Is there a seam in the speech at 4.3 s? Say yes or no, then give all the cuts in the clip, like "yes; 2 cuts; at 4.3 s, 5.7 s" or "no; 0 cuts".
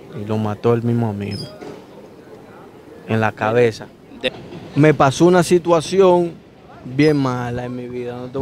yes; 1 cut; at 4.3 s